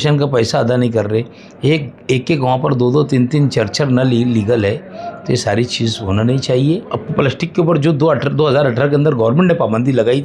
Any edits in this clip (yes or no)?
yes